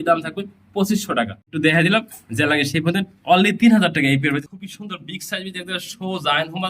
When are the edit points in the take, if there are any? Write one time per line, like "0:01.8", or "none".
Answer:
0:01.4
0:04.4